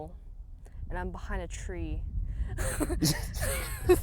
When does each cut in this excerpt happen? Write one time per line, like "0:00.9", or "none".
none

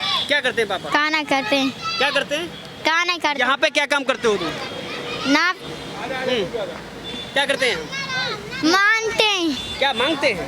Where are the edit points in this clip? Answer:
none

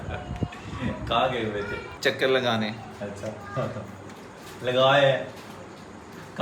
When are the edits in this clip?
0:01.8

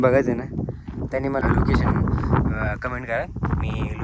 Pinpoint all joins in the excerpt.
0:01.4

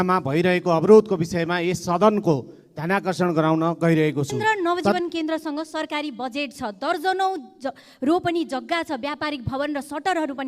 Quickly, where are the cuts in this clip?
0:04.4

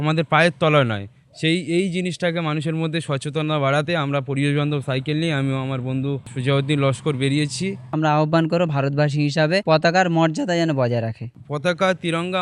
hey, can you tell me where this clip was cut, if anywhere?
0:06.3
0:07.9
0:09.6
0:11.2

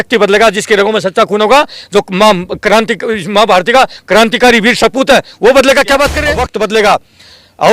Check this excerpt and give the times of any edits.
0:06.2

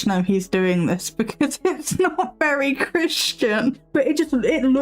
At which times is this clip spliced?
0:03.8

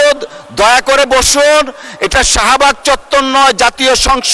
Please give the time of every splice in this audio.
none

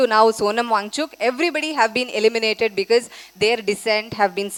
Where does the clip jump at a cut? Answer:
none

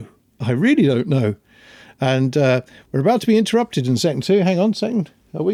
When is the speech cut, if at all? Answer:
none

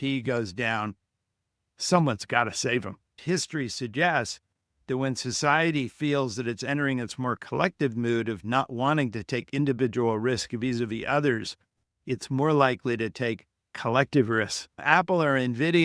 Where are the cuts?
0:03.1
0:14.7

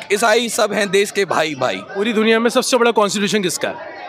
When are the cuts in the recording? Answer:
0:02.0

